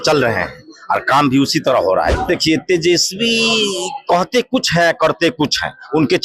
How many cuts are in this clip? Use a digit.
1